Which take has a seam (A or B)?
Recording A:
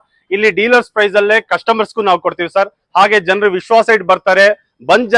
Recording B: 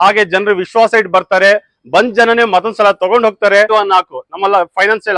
B